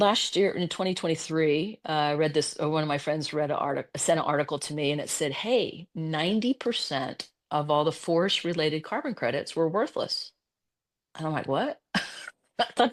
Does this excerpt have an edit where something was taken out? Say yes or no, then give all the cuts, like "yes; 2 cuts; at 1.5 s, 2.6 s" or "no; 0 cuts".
no; 0 cuts